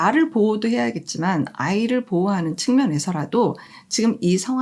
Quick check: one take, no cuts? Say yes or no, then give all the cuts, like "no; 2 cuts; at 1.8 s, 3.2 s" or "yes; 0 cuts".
yes; 0 cuts